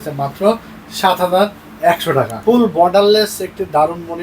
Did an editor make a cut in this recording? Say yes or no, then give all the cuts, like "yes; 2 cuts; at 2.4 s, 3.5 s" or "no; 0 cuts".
yes; 1 cut; at 2.3 s